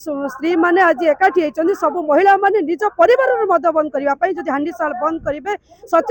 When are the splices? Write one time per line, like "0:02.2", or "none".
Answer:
none

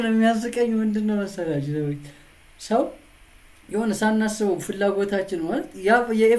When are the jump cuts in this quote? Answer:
none

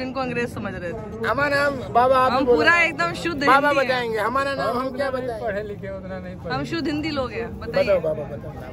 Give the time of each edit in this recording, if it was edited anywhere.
none

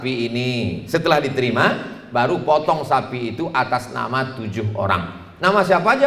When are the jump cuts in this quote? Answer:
none

